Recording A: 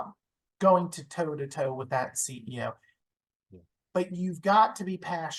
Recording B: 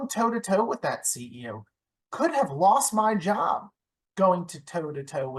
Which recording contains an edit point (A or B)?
A